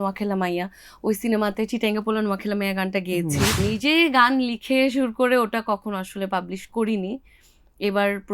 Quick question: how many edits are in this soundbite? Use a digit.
1